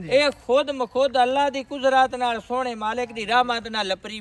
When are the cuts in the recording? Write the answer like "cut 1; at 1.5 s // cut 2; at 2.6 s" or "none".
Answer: none